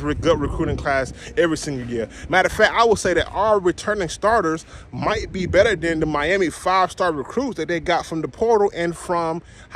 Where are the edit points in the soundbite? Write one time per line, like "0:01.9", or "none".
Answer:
none